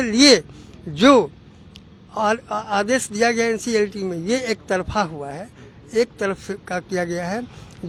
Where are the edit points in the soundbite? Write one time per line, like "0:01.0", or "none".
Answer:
none